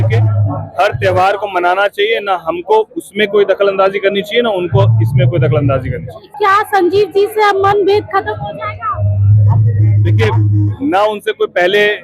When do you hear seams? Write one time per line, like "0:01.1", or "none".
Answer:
0:06.3